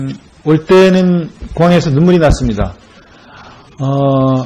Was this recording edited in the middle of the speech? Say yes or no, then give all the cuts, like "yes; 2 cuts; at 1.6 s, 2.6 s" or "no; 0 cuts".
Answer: no; 0 cuts